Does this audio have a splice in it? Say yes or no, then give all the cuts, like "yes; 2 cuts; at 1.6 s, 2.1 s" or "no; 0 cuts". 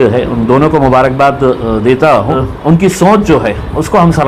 yes; 1 cut; at 2.5 s